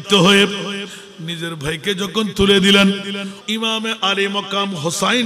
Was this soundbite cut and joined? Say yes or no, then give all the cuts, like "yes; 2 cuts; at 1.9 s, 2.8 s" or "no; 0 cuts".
yes; 1 cut; at 3.3 s